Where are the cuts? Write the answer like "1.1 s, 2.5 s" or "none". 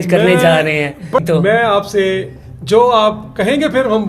1.2 s